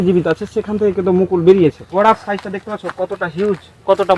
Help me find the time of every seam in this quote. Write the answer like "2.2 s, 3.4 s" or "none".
1.8 s